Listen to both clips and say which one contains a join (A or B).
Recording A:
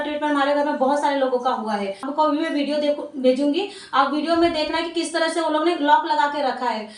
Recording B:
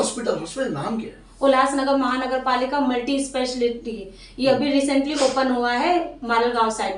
A